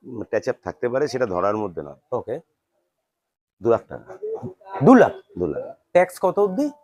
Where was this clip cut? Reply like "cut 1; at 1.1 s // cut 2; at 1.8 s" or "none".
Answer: none

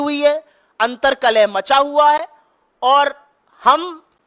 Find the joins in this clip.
none

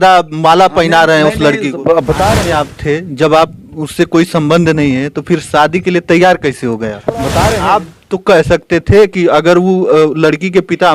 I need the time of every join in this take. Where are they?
cut 1; at 2.4 s // cut 2; at 7.4 s

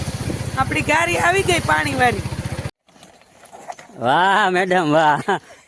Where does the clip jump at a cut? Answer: cut 1; at 2.7 s

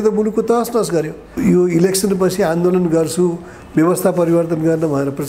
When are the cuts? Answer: cut 1; at 1.2 s

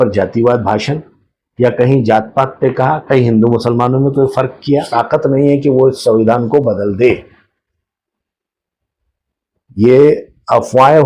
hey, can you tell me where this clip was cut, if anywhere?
cut 1; at 4.9 s

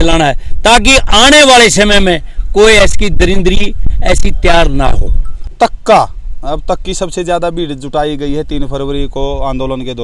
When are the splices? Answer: cut 1; at 5.5 s

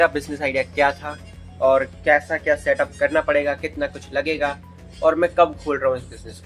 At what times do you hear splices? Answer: none

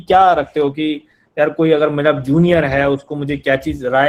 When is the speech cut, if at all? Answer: none

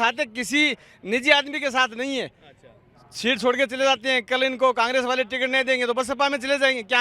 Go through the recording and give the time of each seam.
none

